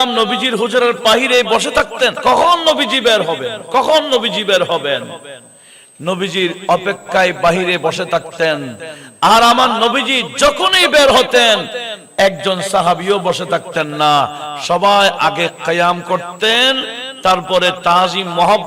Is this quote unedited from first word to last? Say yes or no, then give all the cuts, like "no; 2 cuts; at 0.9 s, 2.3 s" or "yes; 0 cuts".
no; 1 cut; at 2.2 s